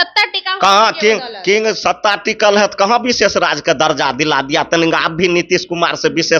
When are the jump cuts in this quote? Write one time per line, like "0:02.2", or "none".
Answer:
none